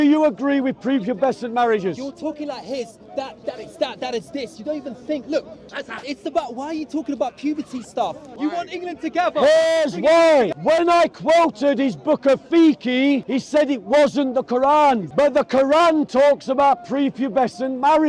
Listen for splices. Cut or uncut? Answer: cut